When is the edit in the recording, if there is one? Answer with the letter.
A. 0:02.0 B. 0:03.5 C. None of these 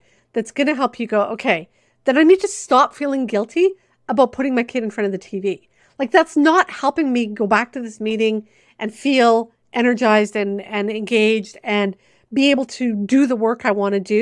C